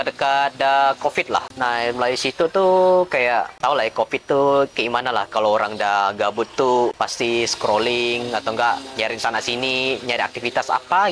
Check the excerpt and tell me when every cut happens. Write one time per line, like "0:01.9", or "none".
0:01.5
0:03.5
0:06.9